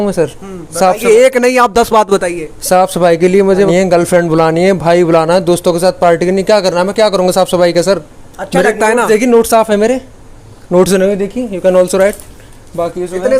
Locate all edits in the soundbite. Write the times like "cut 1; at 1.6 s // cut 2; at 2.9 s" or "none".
cut 1; at 3.7 s